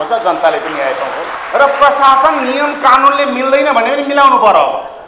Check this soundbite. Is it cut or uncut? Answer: cut